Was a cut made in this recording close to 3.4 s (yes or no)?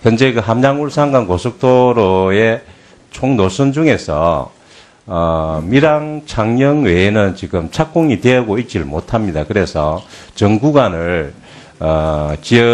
yes